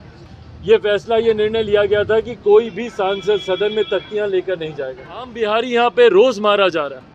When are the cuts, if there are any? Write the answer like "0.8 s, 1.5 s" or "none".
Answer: 5.3 s